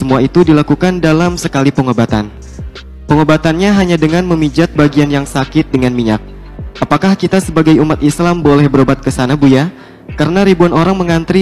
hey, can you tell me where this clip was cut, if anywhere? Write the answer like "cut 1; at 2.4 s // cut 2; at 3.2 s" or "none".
none